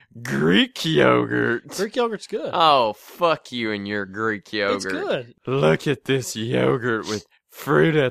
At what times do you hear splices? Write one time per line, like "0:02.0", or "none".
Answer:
0:05.3